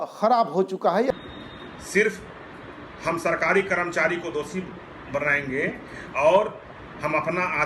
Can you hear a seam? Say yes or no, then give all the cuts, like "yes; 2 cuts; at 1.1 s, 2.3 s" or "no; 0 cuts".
yes; 1 cut; at 1.1 s